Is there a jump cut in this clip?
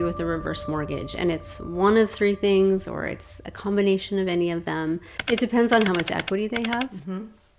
no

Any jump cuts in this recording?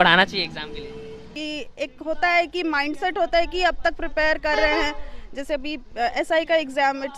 yes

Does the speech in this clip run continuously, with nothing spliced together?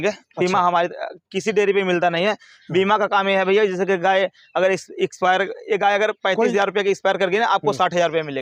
yes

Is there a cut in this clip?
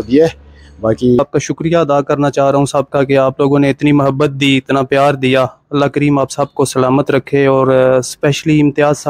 yes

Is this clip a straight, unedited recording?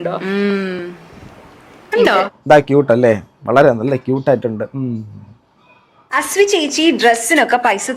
no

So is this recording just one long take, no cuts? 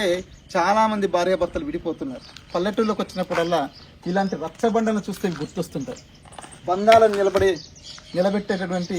yes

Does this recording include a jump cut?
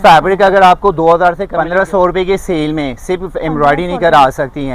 yes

